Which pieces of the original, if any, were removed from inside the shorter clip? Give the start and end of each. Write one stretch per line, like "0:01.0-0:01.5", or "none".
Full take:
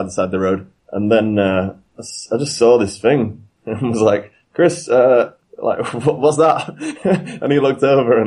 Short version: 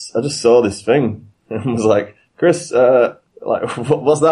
none